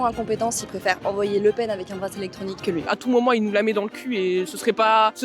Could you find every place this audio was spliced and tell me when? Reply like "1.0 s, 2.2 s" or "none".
2.9 s